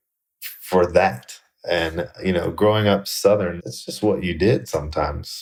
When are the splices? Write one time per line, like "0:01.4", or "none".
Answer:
none

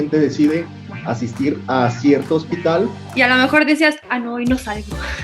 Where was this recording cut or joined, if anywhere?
0:03.0

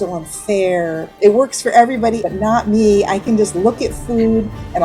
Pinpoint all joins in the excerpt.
0:01.1

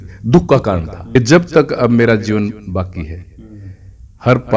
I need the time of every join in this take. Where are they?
0:01.1

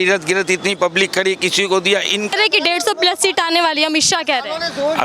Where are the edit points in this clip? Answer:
0:02.3

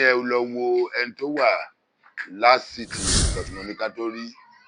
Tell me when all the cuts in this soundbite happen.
0:03.2

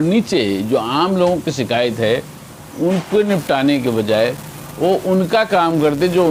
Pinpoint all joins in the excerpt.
none

